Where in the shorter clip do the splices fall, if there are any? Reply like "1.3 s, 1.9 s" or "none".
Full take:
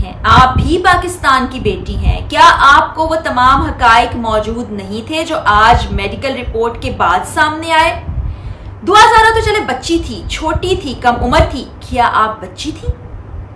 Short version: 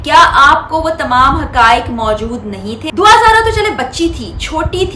2.7 s